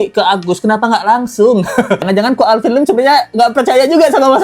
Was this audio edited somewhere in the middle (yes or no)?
yes